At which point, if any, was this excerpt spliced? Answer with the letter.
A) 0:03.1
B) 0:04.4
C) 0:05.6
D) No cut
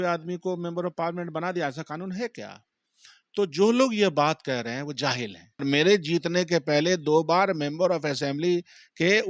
C